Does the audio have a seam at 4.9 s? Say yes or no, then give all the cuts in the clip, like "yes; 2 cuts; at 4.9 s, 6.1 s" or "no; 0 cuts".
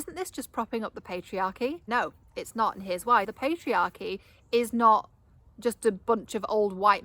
no; 2 cuts; at 1.8 s, 3.3 s